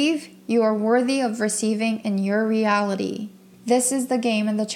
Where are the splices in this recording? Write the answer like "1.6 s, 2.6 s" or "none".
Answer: 3.4 s